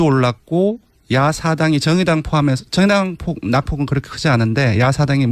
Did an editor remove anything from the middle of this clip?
yes; 1 cut; at 2.6 s

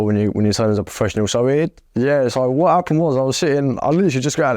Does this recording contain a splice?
yes; 1 cut; at 1.8 s

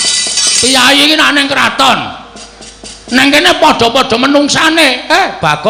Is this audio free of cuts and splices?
yes; 0 cuts

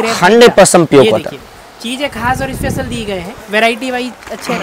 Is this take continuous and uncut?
yes; 0 cuts

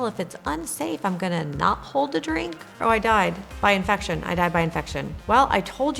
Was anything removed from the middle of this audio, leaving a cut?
yes; 1 cut; at 2.6 s

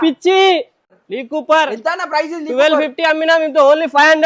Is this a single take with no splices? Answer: no; 1 cut; at 0.9 s

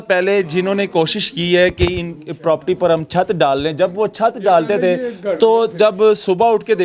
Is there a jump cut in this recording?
no; 0 cuts

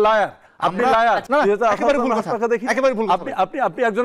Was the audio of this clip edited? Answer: yes; 1 cut; at 1.2 s

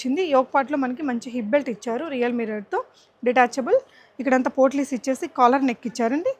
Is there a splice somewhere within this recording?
no; 0 cuts

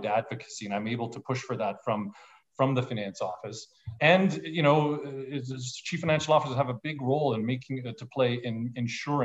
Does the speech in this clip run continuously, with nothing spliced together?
yes; 0 cuts

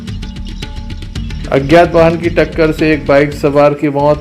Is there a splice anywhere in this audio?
yes; 1 cut; at 1.3 s

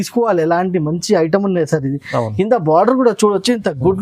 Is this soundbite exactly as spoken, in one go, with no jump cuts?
yes; 0 cuts

